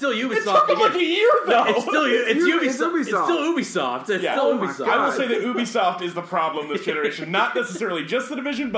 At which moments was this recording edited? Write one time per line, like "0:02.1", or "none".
none